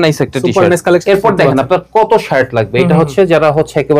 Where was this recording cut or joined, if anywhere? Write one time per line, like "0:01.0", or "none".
0:01.0